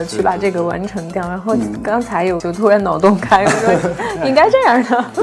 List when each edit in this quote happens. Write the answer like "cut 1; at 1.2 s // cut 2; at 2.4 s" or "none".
none